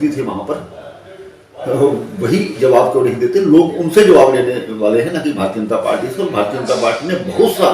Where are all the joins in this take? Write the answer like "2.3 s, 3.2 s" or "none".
none